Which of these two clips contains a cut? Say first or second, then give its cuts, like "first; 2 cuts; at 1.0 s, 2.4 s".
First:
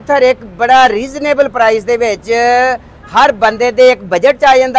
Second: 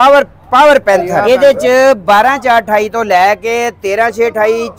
second; 1 cut; at 1.1 s